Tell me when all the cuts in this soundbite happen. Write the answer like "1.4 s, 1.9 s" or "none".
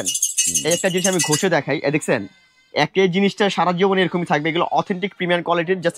none